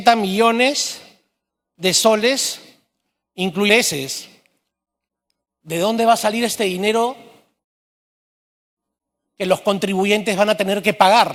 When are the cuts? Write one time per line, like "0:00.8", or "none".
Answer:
none

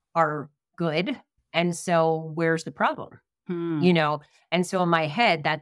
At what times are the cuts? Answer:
none

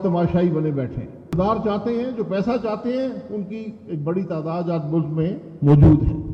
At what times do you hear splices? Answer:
0:01.3

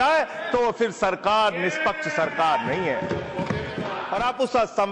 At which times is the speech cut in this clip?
0:04.0

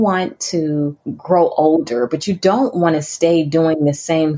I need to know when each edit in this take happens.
0:01.1

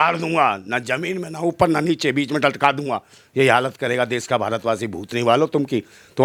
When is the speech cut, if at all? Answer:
none

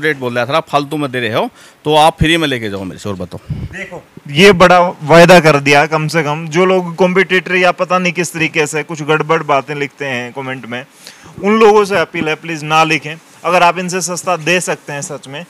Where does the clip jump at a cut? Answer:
none

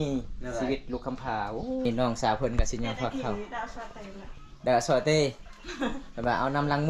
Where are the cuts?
0:01.9

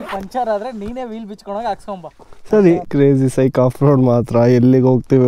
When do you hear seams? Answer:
0:02.9

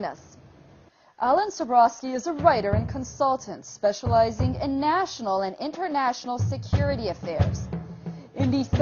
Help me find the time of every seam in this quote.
0:04.4

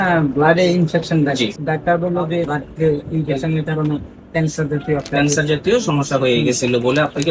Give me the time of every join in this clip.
0:01.6
0:02.5

